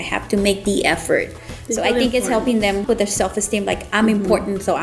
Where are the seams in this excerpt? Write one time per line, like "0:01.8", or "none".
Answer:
0:02.8